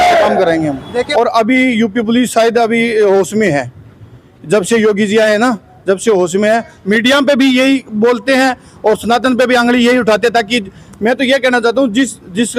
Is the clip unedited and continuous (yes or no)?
no